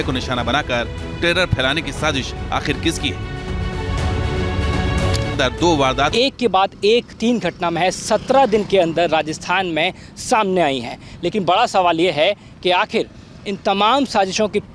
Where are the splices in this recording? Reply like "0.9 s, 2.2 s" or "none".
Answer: 6.1 s